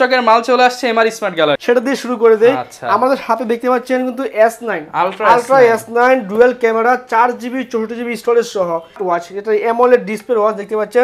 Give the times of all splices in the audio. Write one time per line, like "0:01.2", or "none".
0:01.6
0:09.0